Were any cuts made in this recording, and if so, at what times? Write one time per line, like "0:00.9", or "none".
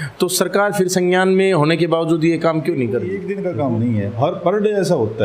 0:03.2